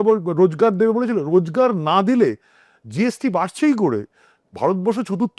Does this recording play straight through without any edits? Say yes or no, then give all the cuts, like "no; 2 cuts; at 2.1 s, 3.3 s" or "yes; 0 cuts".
yes; 0 cuts